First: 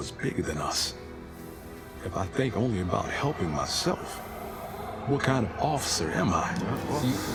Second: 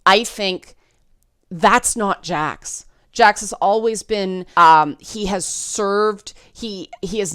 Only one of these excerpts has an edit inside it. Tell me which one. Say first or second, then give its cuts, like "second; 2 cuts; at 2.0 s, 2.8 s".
second; 1 cut; at 4.4 s